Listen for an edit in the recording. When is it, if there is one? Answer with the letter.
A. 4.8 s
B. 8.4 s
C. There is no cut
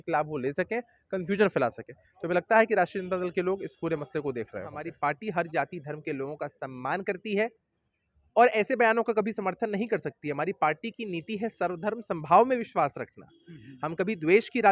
A